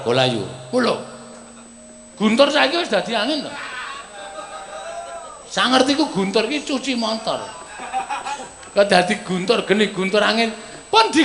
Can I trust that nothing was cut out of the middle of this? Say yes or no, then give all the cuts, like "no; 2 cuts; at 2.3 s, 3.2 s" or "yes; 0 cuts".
yes; 0 cuts